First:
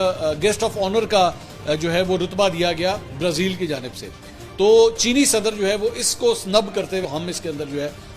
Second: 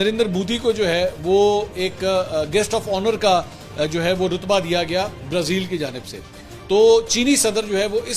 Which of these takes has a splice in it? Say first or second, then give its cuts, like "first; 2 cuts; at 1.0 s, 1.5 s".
first; 1 cut; at 7.0 s